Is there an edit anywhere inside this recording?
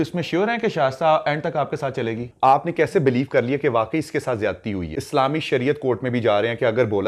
yes; 2 cuts; at 2.3 s, 4.9 s

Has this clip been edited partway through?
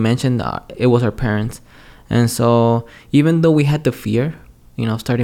no; 0 cuts

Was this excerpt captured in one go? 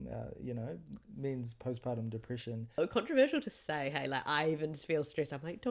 no; 1 cut; at 2.8 s

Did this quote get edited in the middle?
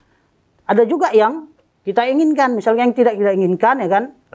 no; 0 cuts

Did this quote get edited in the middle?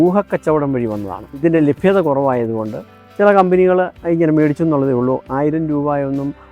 yes; 1 cut; at 1.3 s

